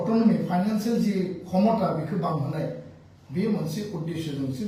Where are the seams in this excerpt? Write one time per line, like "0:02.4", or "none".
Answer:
none